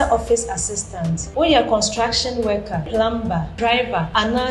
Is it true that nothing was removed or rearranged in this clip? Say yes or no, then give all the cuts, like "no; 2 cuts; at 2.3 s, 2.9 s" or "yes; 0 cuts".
yes; 0 cuts